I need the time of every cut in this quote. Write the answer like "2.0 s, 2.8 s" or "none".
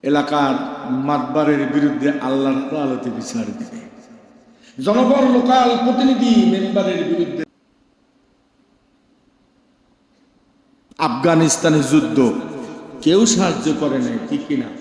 7.4 s